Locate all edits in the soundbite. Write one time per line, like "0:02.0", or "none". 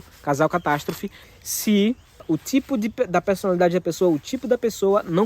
0:01.2
0:02.3